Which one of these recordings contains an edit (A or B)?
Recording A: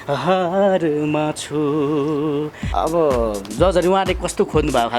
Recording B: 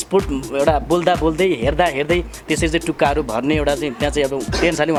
A